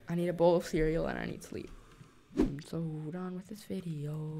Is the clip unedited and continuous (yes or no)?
no